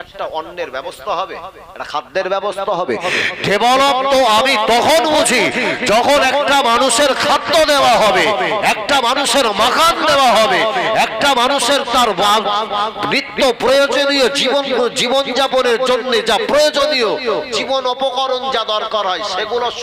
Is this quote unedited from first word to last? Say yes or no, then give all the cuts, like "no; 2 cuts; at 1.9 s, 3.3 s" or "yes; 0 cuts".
yes; 0 cuts